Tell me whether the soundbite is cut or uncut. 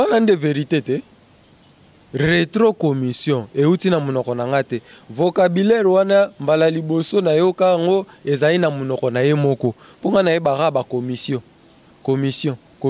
uncut